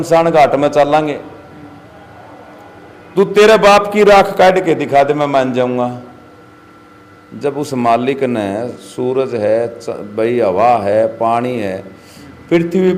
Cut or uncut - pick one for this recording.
uncut